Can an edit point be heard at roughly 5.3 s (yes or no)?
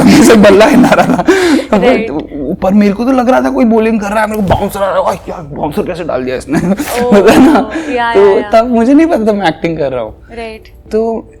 no